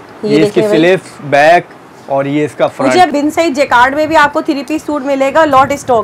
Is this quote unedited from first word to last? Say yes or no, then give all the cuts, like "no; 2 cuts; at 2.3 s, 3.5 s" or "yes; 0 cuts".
no; 1 cut; at 3.1 s